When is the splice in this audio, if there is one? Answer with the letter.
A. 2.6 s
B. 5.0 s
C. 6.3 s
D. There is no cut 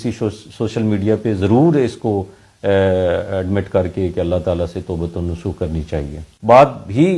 C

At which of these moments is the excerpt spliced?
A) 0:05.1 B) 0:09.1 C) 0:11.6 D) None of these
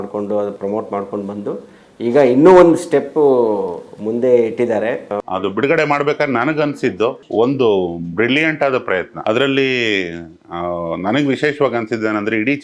A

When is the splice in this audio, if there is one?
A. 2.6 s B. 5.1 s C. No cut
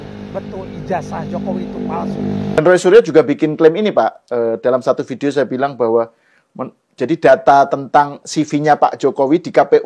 A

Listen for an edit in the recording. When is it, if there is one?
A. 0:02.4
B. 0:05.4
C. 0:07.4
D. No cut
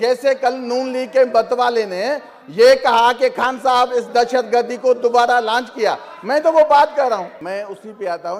C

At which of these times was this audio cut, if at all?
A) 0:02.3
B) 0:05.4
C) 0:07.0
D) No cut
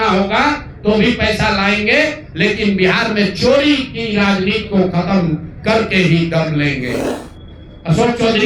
C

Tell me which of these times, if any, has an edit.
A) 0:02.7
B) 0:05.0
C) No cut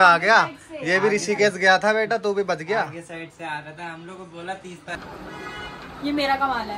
B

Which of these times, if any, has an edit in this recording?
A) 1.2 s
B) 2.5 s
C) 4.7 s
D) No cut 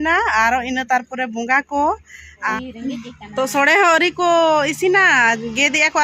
B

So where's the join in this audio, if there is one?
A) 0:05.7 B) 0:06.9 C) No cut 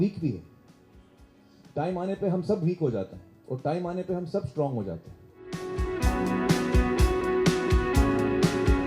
A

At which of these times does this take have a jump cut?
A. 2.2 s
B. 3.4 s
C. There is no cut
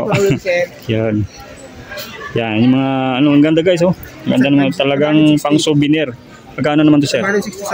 C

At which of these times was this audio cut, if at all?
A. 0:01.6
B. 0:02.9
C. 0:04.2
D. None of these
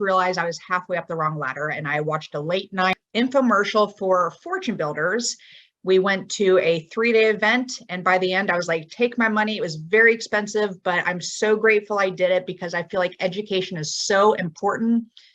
B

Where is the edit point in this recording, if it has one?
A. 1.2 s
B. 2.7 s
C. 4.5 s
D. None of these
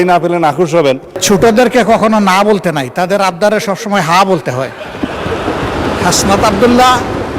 A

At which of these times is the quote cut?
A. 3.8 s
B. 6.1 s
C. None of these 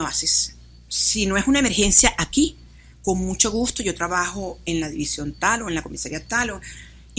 C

